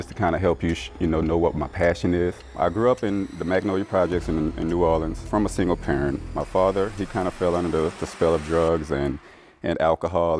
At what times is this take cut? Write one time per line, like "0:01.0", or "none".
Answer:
0:02.5
0:05.2